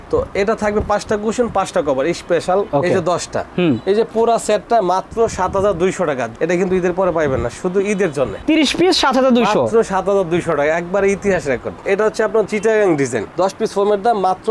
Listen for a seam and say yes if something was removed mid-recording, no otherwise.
yes